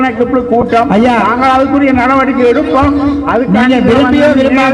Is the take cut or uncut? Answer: uncut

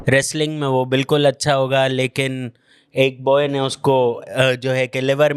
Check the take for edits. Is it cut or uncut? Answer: uncut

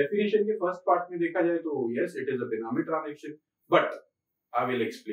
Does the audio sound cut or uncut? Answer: uncut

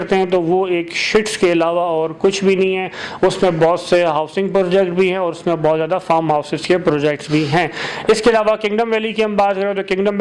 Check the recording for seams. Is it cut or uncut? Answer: uncut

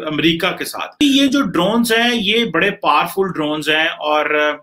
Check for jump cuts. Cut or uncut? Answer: cut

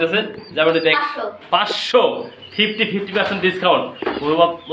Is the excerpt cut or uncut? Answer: cut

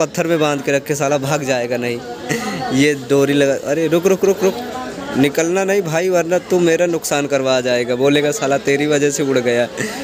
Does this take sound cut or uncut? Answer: uncut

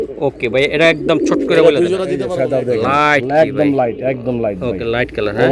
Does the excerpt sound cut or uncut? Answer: cut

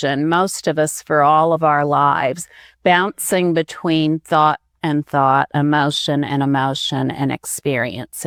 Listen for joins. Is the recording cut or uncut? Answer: uncut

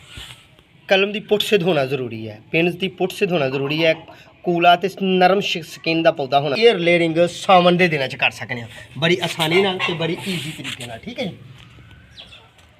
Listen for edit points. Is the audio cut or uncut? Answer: cut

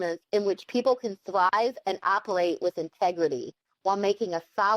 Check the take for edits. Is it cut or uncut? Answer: uncut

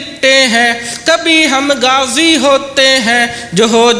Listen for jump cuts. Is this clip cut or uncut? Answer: uncut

